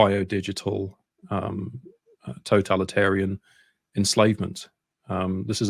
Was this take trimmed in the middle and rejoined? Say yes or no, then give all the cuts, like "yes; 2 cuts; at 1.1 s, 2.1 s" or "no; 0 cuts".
no; 0 cuts